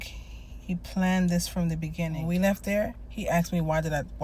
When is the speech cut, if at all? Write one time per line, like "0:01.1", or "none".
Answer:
0:02.2